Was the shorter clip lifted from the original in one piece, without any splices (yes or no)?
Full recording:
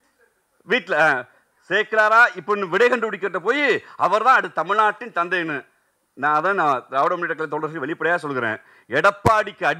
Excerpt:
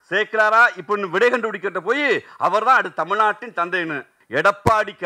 no